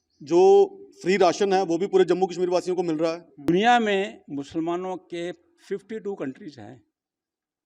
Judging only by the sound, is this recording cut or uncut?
cut